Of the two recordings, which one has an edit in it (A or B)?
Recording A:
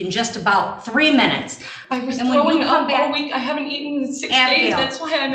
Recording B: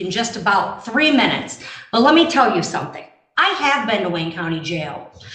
A